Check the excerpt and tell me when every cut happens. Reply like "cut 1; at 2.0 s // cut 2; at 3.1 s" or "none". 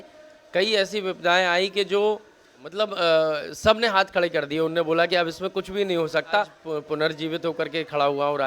cut 1; at 2.7 s // cut 2; at 6.6 s